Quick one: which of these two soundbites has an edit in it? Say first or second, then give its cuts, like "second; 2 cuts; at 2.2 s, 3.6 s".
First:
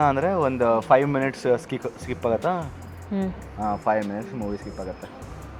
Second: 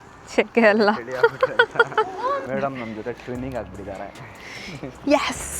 second; 1 cut; at 2.5 s